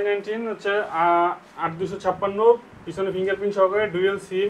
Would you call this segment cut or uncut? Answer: uncut